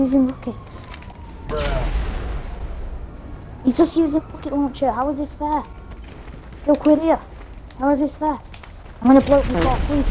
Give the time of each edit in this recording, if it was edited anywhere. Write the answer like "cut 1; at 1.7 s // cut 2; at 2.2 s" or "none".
none